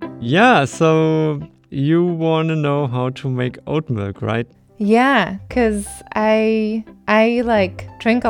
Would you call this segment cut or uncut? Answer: uncut